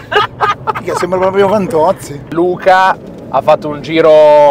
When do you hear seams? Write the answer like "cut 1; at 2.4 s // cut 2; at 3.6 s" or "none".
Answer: cut 1; at 2.3 s